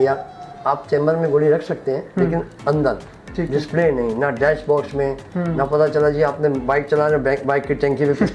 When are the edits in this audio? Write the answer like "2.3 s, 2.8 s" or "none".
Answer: none